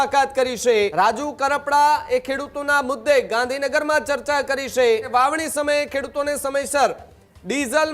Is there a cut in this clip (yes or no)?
yes